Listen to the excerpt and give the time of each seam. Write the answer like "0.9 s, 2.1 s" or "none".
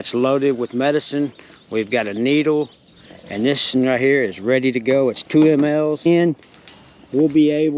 6.1 s